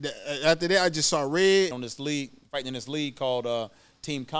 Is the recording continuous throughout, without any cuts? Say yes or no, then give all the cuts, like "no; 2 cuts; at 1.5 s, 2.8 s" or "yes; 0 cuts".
no; 1 cut; at 1.9 s